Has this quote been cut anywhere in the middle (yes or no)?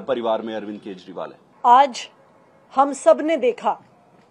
no